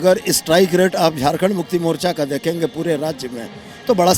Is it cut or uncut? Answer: uncut